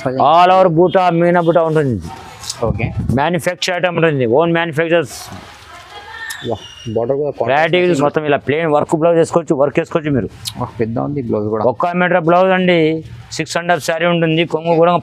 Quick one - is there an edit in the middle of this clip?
yes; 1 cut; at 8.0 s

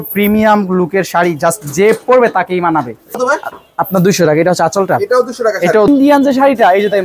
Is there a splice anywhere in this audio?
yes; 2 cuts; at 3.2 s, 5.9 s

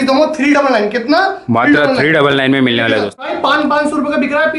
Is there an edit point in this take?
yes; 1 cut; at 3.2 s

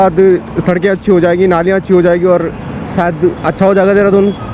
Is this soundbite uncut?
yes; 0 cuts

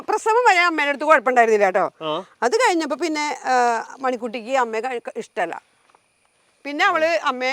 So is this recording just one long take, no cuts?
yes; 0 cuts

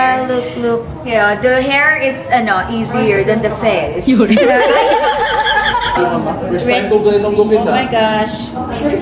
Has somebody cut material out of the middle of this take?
yes; 1 cut; at 6.0 s

